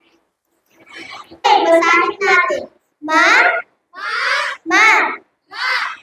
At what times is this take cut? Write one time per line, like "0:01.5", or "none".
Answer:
0:01.4